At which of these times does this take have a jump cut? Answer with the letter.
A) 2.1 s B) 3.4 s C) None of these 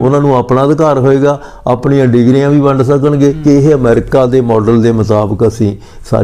B